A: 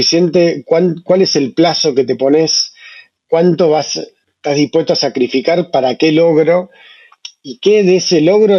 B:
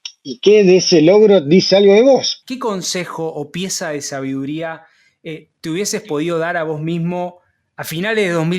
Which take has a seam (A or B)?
B